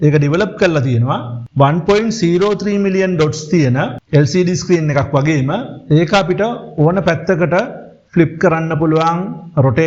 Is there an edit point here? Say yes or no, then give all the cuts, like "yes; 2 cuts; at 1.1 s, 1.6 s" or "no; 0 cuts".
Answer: no; 0 cuts